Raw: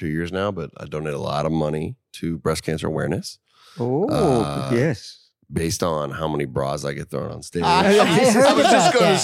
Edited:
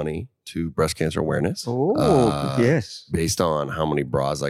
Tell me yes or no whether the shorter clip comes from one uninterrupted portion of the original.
no